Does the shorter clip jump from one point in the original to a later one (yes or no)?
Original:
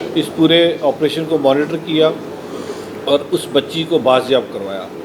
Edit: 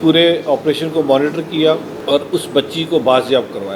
yes